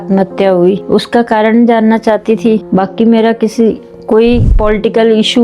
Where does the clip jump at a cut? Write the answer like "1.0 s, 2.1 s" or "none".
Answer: 0.8 s, 2.6 s, 4.5 s